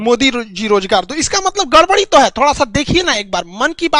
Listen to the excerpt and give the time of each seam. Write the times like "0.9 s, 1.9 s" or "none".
none